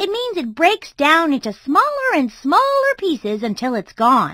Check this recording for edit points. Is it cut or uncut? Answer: uncut